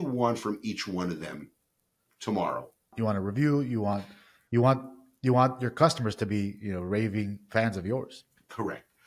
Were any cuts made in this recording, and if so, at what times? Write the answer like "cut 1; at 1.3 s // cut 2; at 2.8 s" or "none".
cut 1; at 2.9 s